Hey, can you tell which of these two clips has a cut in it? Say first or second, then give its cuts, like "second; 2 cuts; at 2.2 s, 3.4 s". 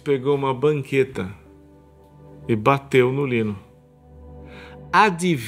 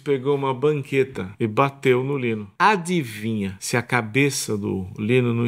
second; 3 cuts; at 1.2 s, 2.5 s, 3.6 s